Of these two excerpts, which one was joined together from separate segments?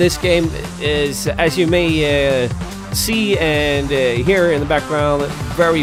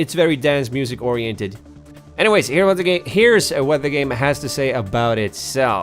second; 1 cut; at 1.3 s

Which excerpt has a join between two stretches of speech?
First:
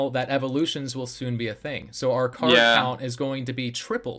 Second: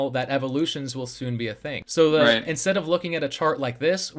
second; 1 cut; at 1.8 s

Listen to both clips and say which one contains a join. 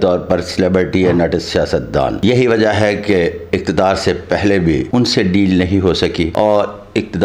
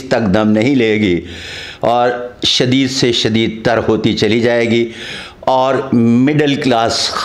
first; 2 cuts; at 4.9 s, 6.3 s

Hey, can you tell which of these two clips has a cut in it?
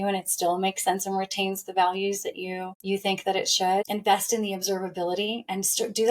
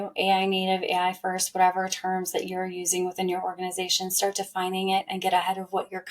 first; 2 cuts; at 2.7 s, 3.9 s

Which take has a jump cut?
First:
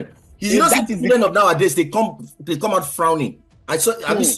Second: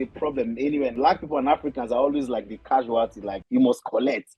second; 2 cuts; at 0.9 s, 3.3 s

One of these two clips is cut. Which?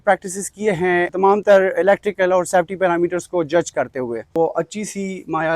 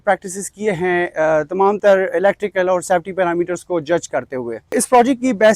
first; 2 cuts; at 1.1 s, 4.3 s

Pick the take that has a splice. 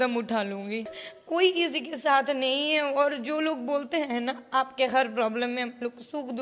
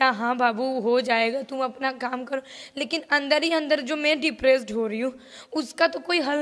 first; 1 cut; at 1.0 s

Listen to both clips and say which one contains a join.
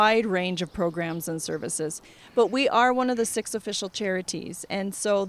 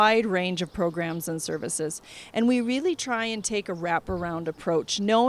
first; 1 cut; at 2.1 s

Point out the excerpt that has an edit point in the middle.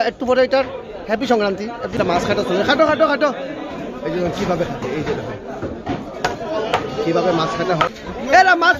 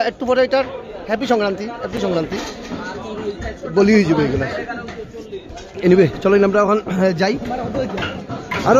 first; 2 cuts; at 2.0 s, 8.0 s

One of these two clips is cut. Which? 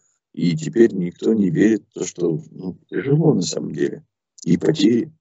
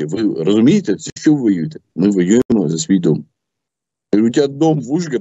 second; 1 cut; at 1.8 s

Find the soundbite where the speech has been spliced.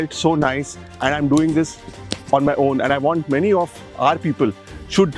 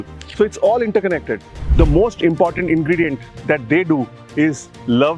second; 1 cut; at 1.6 s

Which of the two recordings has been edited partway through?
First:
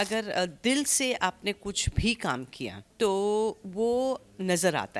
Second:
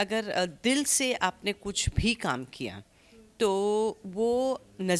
first; 1 cut; at 2.8 s

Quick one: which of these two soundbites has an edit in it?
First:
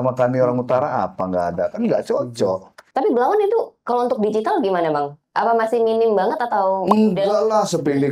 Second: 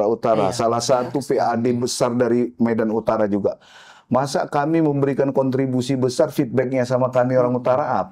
first; 1 cut; at 2.7 s

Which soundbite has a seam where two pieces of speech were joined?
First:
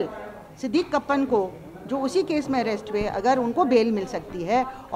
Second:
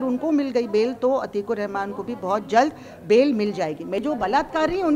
second; 1 cut; at 4.0 s

